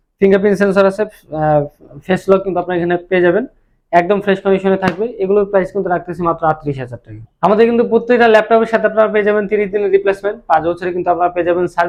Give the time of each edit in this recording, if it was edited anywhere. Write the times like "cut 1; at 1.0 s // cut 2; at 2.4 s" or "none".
none